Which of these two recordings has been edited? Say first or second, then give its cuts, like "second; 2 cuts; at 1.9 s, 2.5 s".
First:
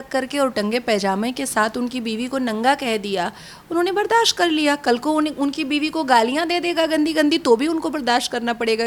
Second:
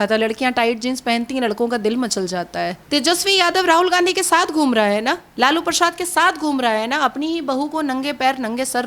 second; 2 cuts; at 2.8 s, 5.3 s